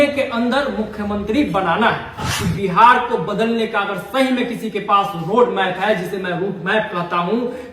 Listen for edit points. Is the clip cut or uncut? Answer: cut